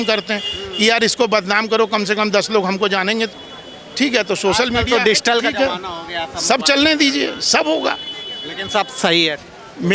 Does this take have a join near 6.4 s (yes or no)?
no